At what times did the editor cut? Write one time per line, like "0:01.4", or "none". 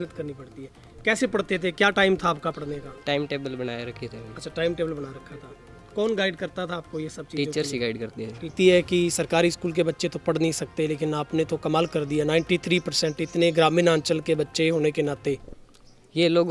0:08.5